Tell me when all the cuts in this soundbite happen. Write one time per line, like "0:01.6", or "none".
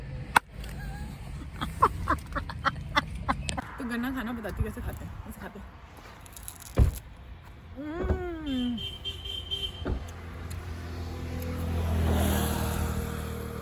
0:03.7